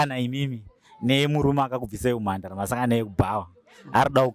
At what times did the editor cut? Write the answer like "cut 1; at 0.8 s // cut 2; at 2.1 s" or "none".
none